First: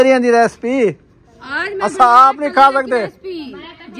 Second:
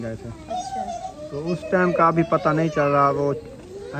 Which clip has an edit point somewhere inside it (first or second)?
second